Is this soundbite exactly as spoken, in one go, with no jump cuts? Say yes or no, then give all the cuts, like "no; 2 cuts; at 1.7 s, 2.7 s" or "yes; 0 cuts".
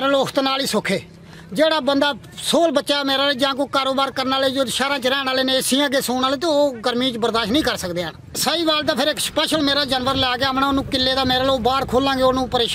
no; 1 cut; at 8.4 s